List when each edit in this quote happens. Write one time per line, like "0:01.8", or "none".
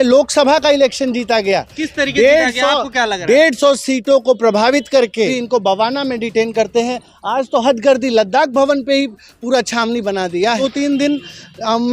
0:05.4
0:10.6

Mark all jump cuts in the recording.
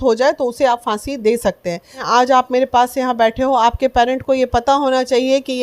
0:02.1

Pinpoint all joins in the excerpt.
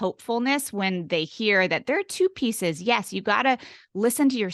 none

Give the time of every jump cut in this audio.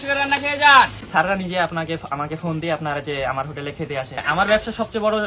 0:01.0
0:04.2

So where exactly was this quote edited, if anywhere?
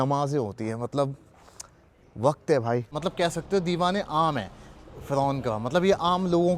0:02.9

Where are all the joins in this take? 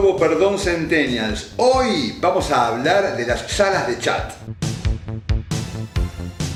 none

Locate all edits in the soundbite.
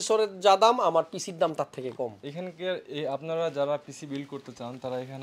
0:02.2

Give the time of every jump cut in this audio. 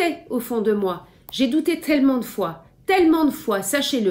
none

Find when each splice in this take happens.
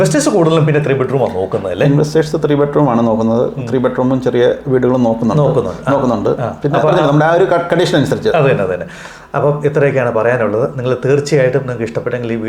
none

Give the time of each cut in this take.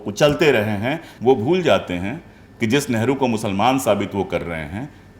0:01.0

